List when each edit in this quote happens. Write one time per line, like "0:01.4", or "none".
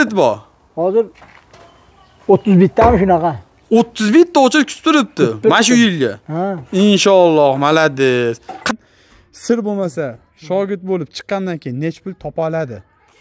0:08.7

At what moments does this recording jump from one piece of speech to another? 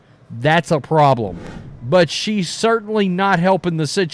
0:01.4

